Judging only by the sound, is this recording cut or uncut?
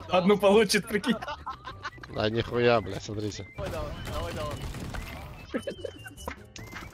uncut